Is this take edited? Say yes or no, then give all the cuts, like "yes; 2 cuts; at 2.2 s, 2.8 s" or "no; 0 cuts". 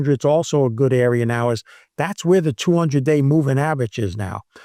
no; 0 cuts